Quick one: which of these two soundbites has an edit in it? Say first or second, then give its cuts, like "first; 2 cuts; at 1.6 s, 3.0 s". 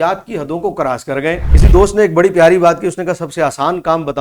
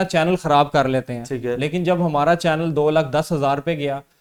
first; 1 cut; at 1.5 s